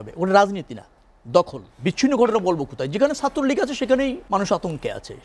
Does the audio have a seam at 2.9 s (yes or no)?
no